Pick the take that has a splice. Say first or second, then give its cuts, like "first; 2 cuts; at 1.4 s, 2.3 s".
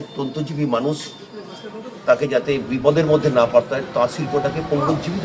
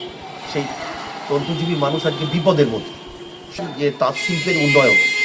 second; 1 cut; at 3.6 s